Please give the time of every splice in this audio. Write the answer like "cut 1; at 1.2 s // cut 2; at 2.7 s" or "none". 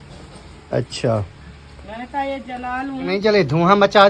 cut 1; at 3.1 s